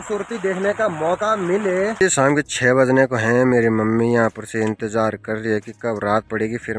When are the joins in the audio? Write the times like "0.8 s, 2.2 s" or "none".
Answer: 2.0 s

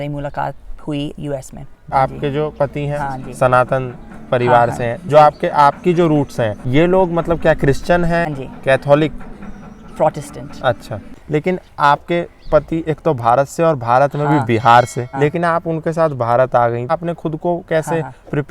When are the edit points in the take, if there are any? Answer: 1.8 s, 2.9 s, 6.6 s, 8.3 s, 11.1 s, 15.0 s, 16.9 s

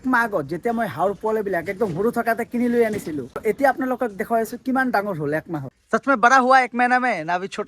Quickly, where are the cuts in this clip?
3.4 s, 5.6 s

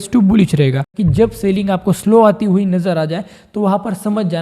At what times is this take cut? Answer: 0.9 s

